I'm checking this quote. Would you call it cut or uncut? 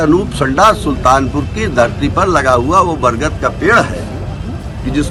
uncut